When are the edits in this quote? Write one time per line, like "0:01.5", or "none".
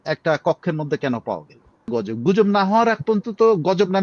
0:01.9